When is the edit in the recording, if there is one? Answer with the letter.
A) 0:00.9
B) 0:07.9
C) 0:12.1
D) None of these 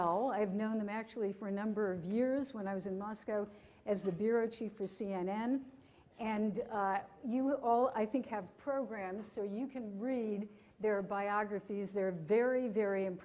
A